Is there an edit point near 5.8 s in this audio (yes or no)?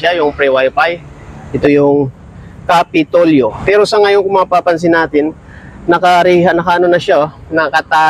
no